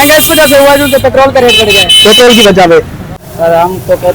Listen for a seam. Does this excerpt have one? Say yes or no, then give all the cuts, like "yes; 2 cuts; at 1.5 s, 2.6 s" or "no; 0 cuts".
yes; 1 cut; at 3.0 s